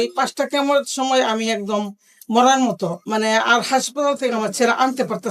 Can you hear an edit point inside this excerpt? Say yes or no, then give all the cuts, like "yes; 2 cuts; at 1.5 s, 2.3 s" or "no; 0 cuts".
yes; 1 cut; at 3.0 s